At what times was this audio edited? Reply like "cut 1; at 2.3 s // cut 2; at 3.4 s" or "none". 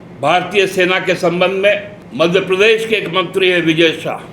cut 1; at 2.0 s